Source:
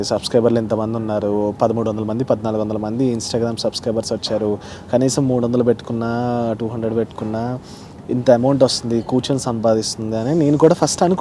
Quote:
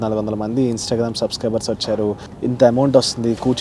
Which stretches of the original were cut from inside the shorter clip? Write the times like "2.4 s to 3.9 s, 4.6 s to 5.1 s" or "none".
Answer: 4.7 s to 7.9 s